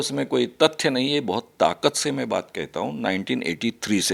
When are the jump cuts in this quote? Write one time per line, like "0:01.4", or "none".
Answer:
none